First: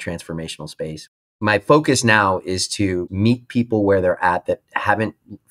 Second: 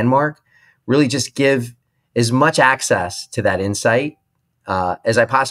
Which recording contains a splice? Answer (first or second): first